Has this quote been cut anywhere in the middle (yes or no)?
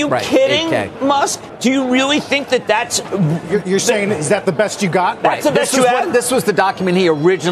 no